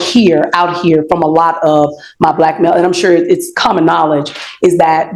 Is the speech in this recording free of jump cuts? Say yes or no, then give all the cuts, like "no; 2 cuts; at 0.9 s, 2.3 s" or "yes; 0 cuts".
yes; 0 cuts